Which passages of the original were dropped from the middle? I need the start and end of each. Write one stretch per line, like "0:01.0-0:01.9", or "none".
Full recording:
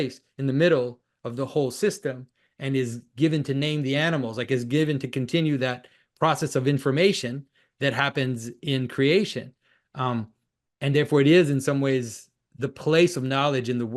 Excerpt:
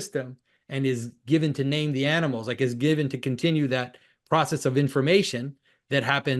none